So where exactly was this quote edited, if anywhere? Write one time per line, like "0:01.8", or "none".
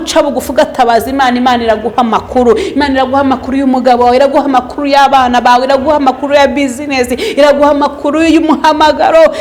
none